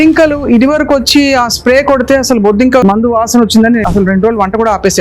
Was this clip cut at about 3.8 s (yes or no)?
yes